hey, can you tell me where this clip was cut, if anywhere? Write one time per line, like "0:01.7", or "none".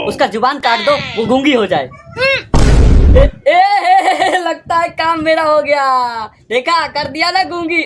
none